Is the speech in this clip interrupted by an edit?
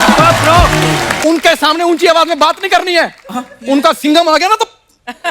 yes; 1 cut; at 1.1 s

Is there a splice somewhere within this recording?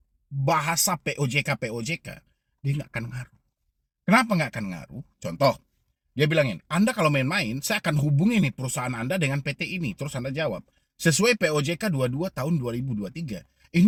no; 0 cuts

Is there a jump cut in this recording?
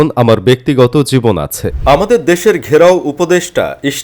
yes; 1 cut; at 1.6 s

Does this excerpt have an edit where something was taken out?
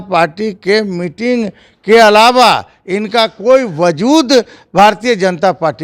no; 0 cuts

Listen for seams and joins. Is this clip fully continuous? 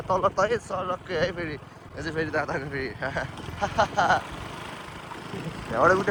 yes; 0 cuts

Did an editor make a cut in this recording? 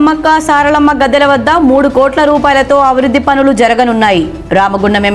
no; 0 cuts

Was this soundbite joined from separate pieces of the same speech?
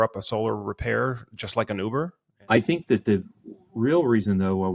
yes; 1 cut; at 2.3 s

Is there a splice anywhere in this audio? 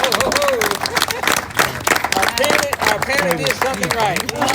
no; 0 cuts

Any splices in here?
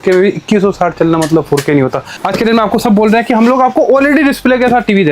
yes; 1 cut; at 2.2 s

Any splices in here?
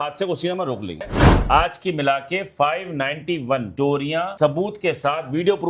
yes; 1 cut; at 1.4 s

